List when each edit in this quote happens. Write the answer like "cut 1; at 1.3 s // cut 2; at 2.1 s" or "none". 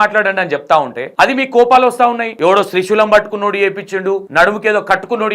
cut 1; at 1.0 s // cut 2; at 2.3 s // cut 3; at 4.3 s